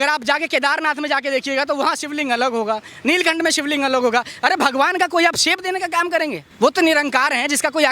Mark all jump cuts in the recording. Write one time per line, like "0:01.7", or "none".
0:06.4